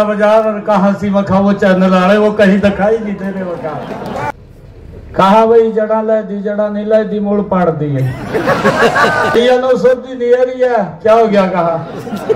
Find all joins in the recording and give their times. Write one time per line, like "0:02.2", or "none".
0:04.3
0:09.3